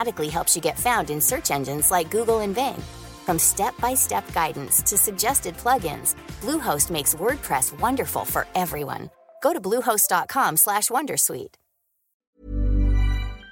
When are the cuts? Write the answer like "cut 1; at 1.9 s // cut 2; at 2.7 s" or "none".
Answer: cut 1; at 12.2 s